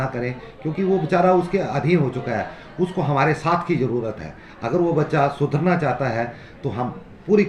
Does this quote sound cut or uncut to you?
uncut